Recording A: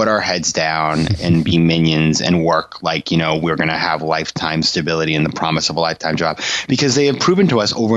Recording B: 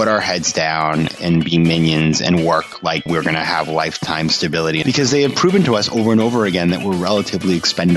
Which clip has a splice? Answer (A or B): B